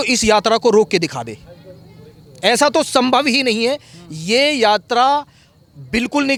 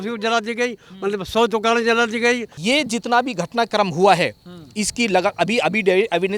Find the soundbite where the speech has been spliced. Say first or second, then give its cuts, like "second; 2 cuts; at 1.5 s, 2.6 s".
second; 1 cut; at 2.5 s